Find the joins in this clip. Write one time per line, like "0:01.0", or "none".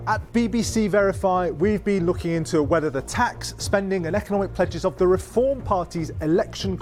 none